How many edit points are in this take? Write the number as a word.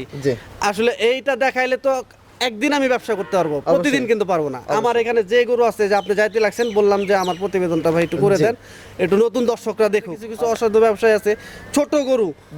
one